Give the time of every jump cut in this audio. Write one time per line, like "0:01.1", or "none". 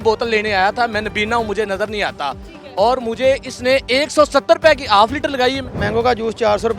0:05.6